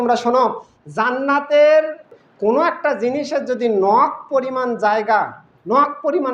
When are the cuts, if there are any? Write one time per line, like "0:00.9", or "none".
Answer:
0:02.0